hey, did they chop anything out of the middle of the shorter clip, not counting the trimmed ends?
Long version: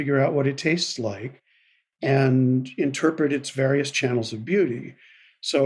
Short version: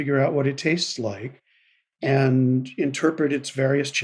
no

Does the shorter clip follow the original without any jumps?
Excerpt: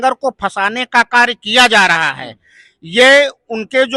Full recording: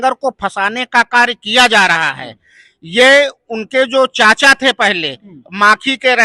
yes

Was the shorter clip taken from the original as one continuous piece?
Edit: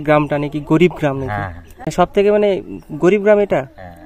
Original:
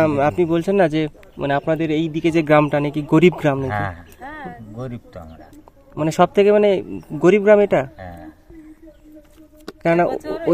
no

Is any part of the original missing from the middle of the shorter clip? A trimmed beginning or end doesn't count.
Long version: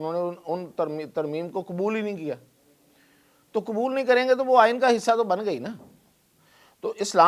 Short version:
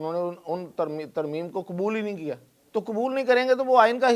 yes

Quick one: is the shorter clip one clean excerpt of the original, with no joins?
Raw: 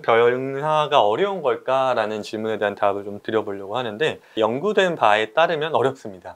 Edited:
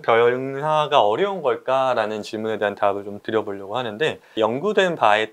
yes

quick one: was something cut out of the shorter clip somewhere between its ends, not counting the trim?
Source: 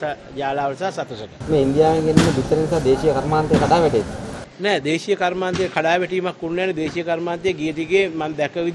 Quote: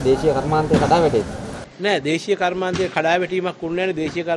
no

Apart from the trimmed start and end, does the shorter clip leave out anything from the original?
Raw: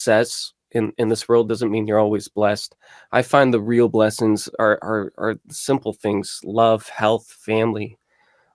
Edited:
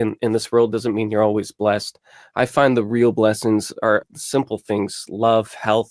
yes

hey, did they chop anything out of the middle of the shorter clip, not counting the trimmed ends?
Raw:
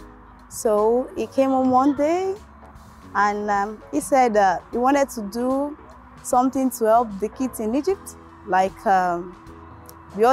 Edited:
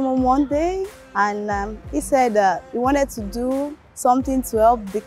yes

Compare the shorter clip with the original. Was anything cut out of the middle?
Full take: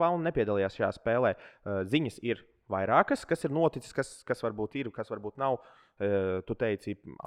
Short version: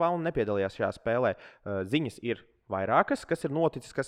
no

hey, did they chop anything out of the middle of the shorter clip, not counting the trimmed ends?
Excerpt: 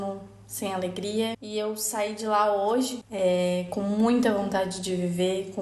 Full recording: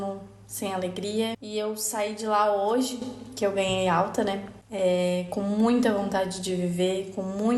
yes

